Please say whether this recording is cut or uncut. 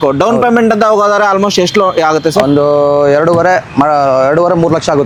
uncut